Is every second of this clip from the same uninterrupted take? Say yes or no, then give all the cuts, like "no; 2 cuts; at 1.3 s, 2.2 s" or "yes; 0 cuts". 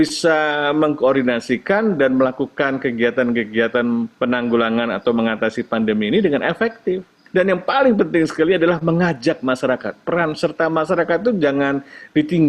no; 2 cuts; at 4.1 s, 7.1 s